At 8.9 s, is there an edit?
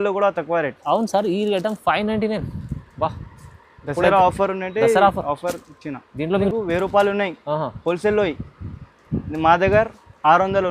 no; 1 cut; at 6.5 s

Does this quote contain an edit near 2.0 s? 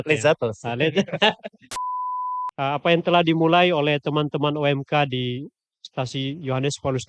yes; 1 cut; at 2.0 s

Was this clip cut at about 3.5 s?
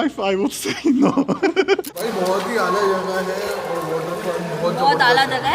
no; 1 cut; at 1.6 s

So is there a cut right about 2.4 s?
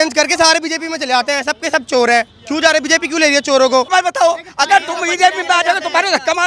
no; 1 cut; at 3.9 s

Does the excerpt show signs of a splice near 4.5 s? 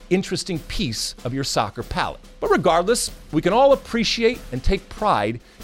yes; 2 cuts; at 2.2 s, 4.5 s

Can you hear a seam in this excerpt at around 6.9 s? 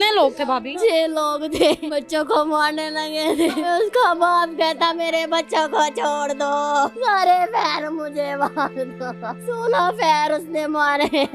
yes; 5 cuts; at 0.7 s, 1.8 s, 3.7 s, 6.9 s, 9.4 s

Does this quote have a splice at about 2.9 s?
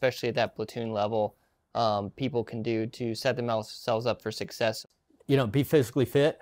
no; 1 cut; at 4.8 s

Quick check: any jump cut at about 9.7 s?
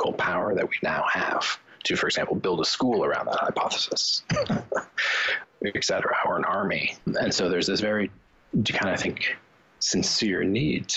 no; 2 cuts; at 5.3 s, 7.1 s

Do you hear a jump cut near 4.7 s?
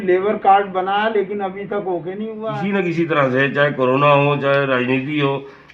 no; 1 cut; at 2.4 s

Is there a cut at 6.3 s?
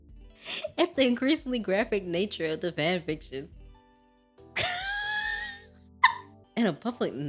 yes; 1 cut; at 6.3 s

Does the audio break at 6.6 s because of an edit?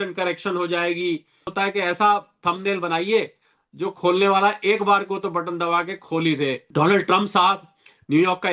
yes; 2 cuts; at 1.5 s, 6.6 s

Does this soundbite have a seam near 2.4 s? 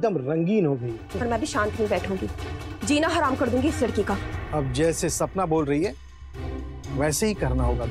no; 2 cuts; at 1.0 s, 4.3 s

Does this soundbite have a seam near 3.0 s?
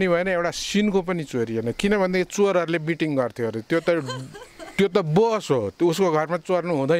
no; 0 cuts

